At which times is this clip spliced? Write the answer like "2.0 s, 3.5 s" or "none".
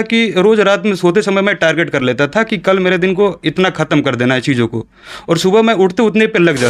none